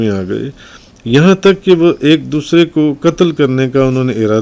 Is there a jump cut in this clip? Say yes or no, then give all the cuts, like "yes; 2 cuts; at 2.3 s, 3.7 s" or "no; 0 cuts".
no; 0 cuts